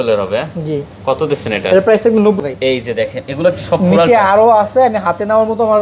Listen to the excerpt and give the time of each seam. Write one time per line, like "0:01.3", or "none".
0:02.4